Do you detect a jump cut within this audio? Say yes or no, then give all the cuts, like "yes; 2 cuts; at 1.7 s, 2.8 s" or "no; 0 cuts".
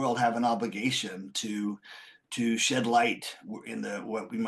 no; 0 cuts